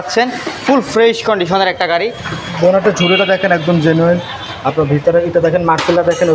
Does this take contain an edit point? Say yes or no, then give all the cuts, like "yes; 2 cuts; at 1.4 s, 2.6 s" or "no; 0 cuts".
yes; 1 cut; at 2.4 s